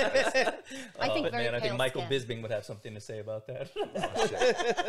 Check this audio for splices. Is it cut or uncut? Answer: uncut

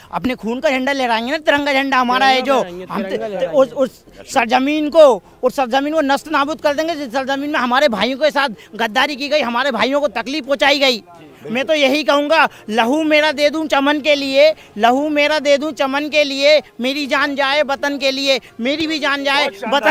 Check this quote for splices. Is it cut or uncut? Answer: uncut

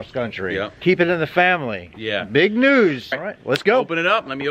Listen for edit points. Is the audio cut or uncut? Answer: cut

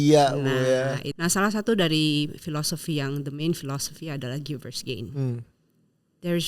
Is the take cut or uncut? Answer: cut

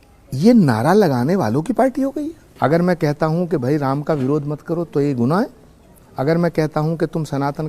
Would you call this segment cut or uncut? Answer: cut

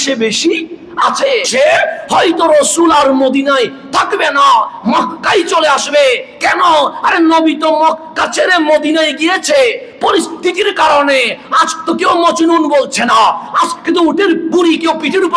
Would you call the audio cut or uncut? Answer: cut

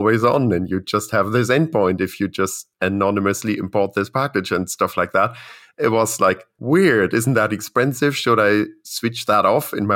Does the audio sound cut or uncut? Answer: cut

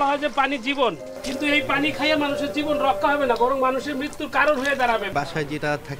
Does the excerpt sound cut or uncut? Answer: cut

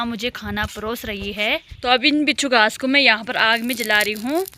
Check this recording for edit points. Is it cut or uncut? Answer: cut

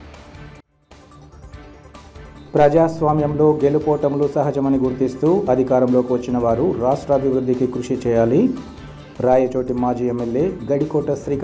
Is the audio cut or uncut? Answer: cut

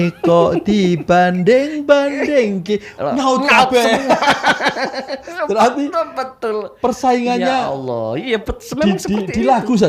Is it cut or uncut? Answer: uncut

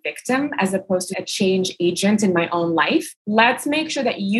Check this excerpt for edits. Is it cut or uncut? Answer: cut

